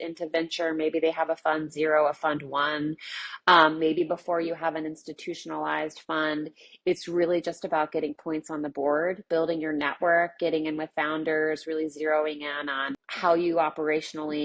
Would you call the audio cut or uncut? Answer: cut